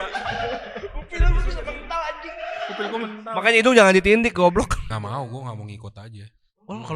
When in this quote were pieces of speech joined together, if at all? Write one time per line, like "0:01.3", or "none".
0:04.8